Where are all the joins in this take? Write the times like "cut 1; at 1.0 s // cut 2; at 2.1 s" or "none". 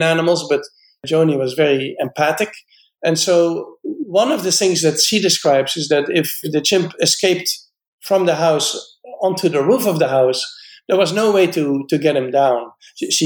cut 1; at 1.0 s // cut 2; at 6.5 s